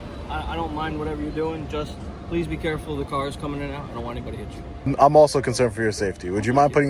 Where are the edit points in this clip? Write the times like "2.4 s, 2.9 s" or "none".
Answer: 4.9 s